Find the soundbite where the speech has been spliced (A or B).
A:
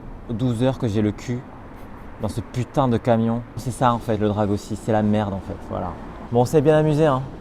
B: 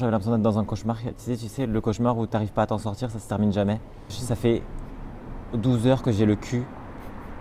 A